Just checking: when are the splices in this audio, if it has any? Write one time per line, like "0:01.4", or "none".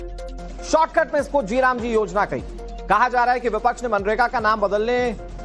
0:02.1

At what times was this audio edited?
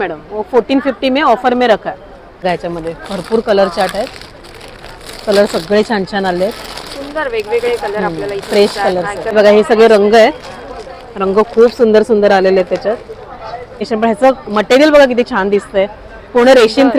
0:02.5
0:09.3
0:13.8

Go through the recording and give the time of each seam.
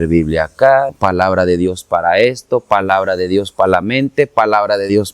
0:00.9

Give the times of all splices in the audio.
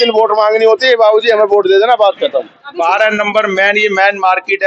0:02.6

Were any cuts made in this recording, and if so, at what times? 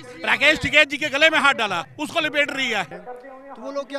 0:01.9
0:03.0

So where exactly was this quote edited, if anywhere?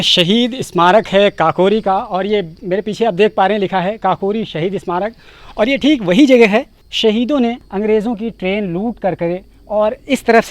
0:06.8
0:07.6

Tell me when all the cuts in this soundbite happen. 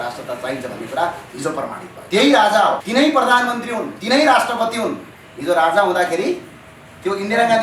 0:01.9
0:02.8

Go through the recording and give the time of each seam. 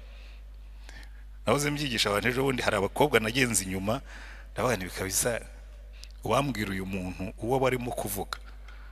none

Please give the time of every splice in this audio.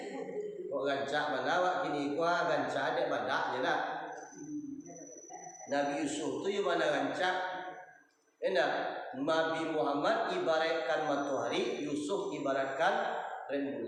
none

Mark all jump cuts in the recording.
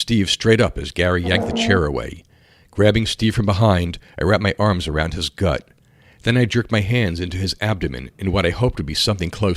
none

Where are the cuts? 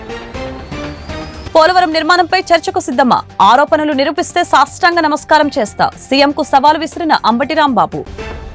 0:01.4

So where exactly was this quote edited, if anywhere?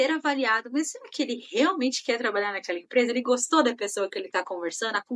none

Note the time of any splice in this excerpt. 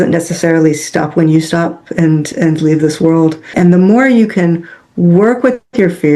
0:03.5

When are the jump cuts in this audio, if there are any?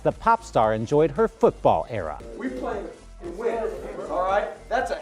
0:02.2

